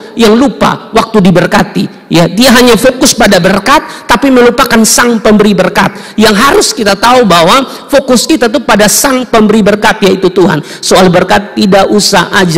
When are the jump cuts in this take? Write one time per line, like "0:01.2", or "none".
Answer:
none